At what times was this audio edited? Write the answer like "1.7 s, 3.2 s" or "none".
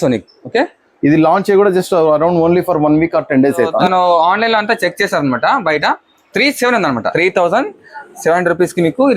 3.8 s, 7.1 s